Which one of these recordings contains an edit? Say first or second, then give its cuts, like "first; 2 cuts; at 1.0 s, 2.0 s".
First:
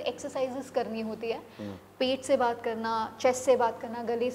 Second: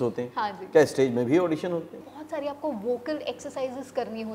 second; 1 cut; at 2.0 s